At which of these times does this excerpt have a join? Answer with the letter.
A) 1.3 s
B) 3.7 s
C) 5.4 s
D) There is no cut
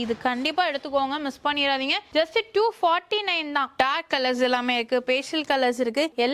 B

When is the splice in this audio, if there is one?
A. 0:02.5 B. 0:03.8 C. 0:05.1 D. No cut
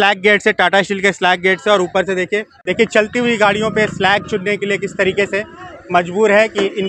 A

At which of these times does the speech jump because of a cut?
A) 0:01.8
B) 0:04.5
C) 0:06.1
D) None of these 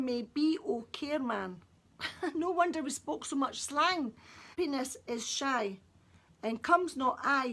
B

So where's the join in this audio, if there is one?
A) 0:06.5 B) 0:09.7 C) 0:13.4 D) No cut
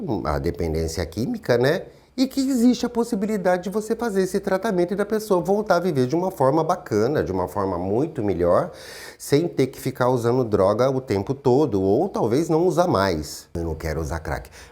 C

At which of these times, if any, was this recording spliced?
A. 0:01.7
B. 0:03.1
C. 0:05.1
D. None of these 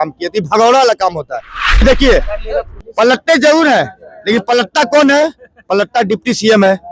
A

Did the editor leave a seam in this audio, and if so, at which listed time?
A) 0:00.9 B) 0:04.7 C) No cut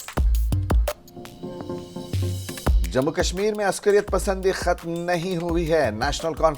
A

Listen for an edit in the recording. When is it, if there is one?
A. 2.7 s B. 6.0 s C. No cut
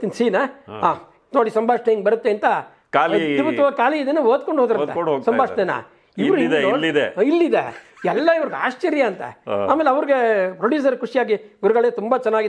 A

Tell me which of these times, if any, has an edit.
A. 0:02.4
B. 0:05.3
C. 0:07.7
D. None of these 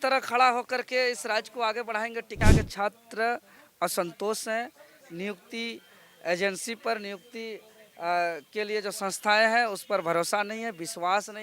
A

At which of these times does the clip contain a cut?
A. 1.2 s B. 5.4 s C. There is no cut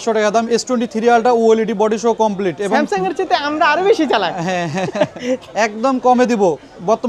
B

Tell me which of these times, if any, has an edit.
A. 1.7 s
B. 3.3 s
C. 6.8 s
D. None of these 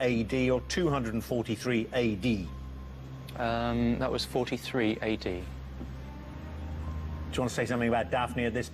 C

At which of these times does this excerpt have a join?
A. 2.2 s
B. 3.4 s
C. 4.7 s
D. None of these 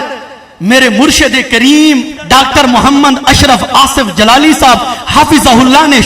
A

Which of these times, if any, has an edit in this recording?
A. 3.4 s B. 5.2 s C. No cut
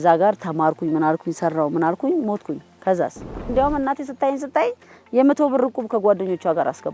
A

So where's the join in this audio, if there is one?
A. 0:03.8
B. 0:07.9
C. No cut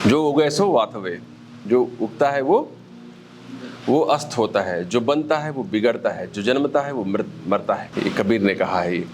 B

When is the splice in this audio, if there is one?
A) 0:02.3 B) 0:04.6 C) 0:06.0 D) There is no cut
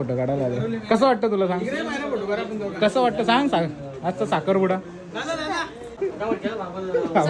C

